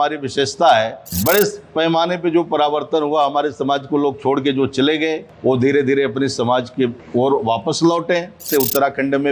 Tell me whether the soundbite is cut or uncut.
cut